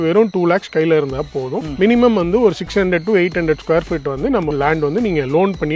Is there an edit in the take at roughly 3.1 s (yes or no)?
no